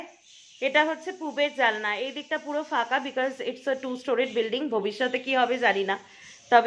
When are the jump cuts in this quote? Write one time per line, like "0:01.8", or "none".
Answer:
none